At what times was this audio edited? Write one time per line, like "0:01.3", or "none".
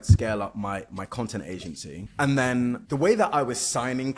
0:02.0
0:02.8